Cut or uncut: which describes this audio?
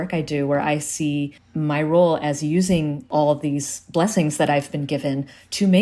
cut